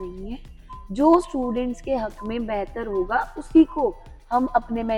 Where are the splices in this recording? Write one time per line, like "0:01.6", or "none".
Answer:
none